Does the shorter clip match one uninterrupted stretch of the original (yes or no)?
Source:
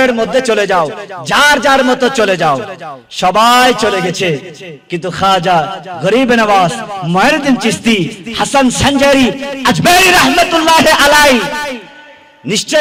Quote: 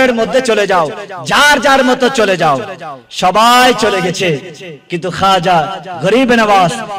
yes